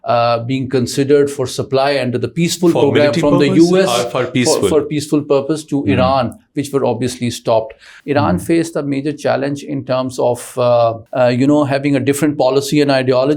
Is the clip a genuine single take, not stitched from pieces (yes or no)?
no